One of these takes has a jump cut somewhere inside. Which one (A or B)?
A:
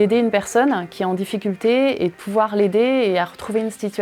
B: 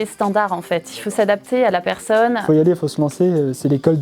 B